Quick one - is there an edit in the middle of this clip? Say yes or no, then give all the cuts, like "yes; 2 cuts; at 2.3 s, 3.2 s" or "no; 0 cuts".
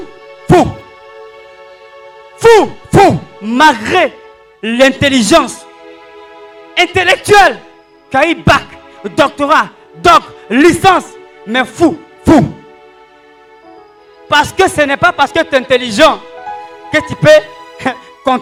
no; 0 cuts